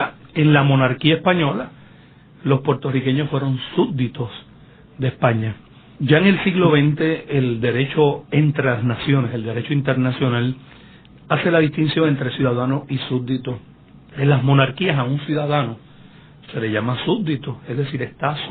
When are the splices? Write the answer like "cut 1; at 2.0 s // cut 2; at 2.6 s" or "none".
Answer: cut 1; at 7.8 s